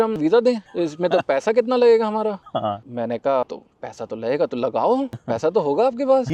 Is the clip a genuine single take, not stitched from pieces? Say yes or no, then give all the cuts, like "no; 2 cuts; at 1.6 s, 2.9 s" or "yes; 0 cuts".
yes; 0 cuts